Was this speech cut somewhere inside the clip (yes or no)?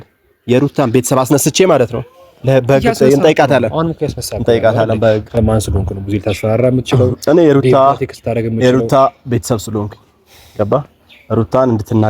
yes